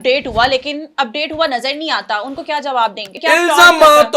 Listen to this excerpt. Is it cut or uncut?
cut